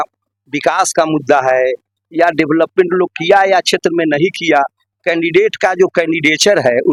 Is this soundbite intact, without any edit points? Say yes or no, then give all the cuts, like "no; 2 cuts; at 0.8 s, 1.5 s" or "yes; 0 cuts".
yes; 0 cuts